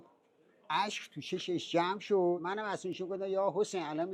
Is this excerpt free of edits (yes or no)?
no